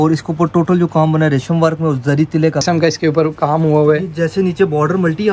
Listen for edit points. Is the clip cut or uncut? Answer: cut